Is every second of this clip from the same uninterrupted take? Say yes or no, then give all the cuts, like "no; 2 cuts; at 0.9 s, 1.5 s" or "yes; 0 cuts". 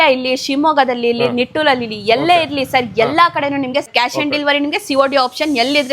no; 1 cut; at 3.9 s